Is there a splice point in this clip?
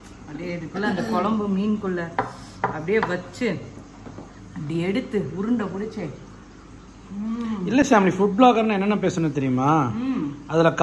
no; 0 cuts

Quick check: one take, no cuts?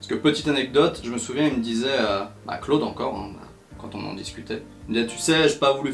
yes; 0 cuts

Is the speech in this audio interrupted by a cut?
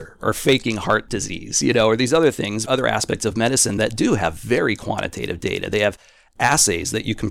yes; 1 cut; at 1.1 s

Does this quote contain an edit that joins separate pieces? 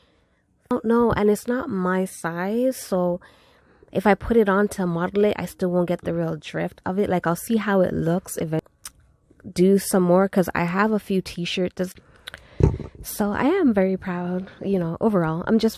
yes; 3 cuts; at 0.7 s, 8.6 s, 11.9 s

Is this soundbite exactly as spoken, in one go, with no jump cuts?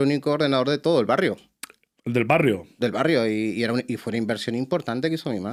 yes; 0 cuts

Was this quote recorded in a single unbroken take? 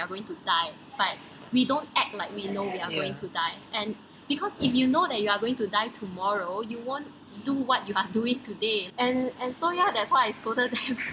yes; 0 cuts

